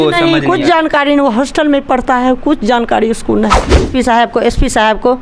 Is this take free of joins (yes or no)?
no